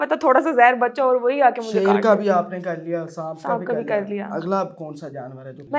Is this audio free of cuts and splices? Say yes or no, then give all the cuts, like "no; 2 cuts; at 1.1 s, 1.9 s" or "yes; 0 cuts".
yes; 0 cuts